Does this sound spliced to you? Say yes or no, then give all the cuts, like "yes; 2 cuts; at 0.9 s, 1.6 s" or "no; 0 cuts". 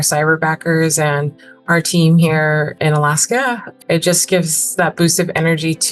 yes; 2 cuts; at 2.7 s, 3.7 s